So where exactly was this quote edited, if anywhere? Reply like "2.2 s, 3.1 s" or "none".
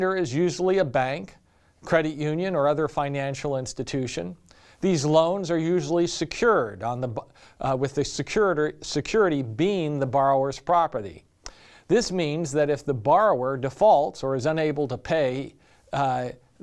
none

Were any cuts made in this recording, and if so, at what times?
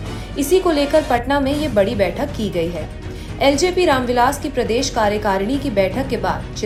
none

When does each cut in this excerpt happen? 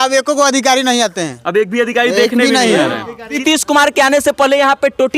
3.4 s

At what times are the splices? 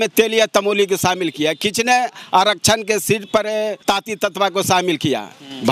3.8 s

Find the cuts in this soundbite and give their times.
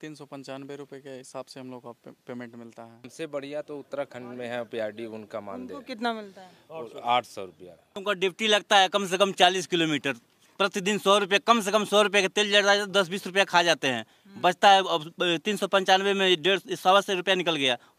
3.1 s, 8.0 s

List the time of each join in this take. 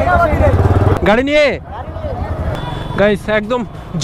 0.9 s, 2.5 s

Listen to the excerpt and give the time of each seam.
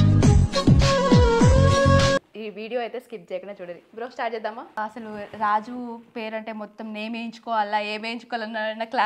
2.3 s, 4.8 s

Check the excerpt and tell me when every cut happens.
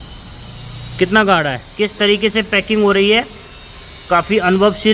1.6 s

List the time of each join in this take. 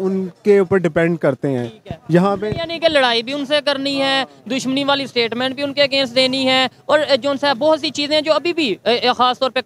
none

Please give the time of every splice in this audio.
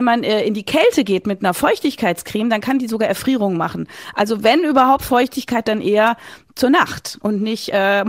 none

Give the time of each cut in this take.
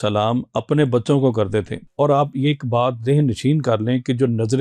1.8 s

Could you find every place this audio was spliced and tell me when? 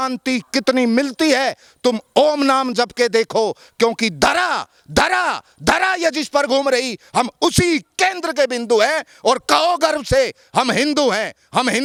none

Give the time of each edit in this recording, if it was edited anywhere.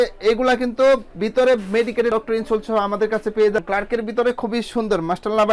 3.6 s

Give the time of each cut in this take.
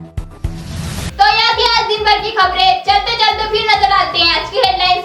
none

